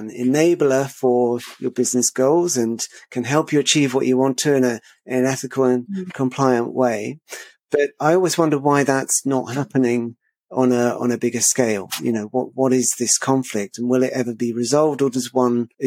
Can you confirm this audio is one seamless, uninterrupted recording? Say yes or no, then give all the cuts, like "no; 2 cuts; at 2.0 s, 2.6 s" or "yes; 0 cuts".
yes; 0 cuts